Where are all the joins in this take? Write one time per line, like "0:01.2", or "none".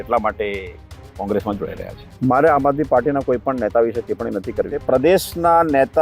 0:02.0
0:04.8